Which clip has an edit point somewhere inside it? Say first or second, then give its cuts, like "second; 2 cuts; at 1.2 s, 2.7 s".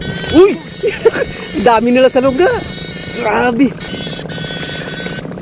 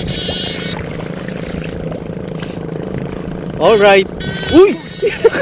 first; 1 cut; at 3.9 s